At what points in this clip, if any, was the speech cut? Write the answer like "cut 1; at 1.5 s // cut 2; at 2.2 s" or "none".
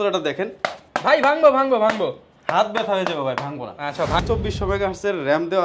cut 1; at 4.2 s